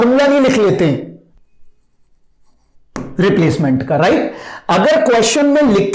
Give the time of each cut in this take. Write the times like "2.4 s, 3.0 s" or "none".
1.2 s